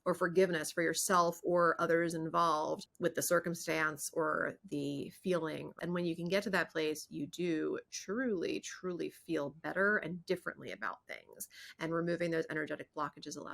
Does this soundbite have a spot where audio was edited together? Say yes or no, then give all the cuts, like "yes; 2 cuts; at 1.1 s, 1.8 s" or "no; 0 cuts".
yes; 2 cuts; at 2.9 s, 5.7 s